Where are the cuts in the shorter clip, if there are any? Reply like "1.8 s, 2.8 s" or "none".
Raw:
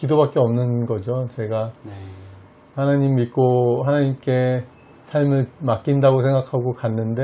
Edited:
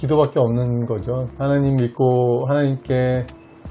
1.3 s